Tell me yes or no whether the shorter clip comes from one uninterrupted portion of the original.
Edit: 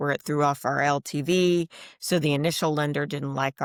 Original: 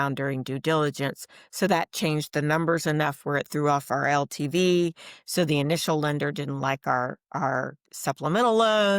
yes